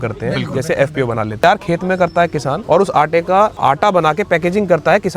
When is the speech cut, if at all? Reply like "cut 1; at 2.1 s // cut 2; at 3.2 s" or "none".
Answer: cut 1; at 1.4 s // cut 2; at 2.6 s // cut 3; at 3.6 s